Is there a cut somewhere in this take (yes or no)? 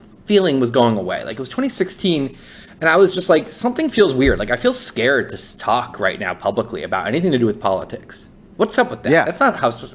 no